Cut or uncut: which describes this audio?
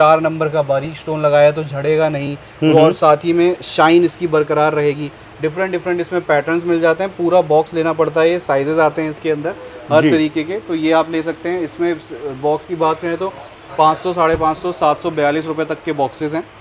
uncut